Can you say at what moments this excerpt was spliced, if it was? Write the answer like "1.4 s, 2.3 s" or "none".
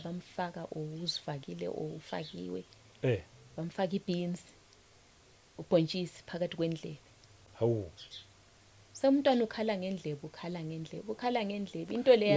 none